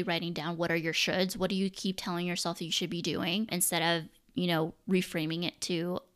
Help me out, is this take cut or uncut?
cut